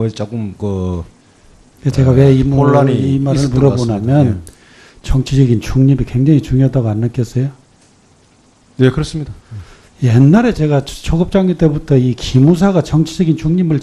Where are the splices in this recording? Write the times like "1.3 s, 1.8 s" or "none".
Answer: 6.5 s